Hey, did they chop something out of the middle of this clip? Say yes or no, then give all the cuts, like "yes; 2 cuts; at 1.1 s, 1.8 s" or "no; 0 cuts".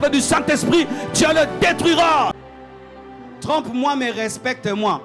yes; 1 cut; at 2.5 s